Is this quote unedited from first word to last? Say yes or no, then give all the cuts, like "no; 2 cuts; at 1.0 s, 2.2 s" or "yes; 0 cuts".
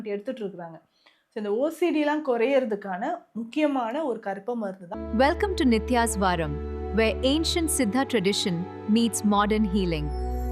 no; 1 cut; at 4.9 s